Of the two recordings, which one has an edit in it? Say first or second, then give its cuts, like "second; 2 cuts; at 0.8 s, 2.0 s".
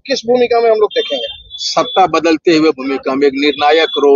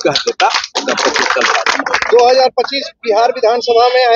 second; 1 cut; at 1.7 s